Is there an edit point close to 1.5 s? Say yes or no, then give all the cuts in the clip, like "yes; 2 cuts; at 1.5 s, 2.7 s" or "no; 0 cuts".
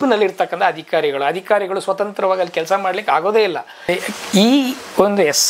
no; 1 cut; at 3.9 s